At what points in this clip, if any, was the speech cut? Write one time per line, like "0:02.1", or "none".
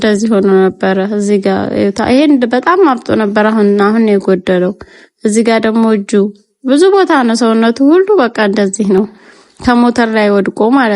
none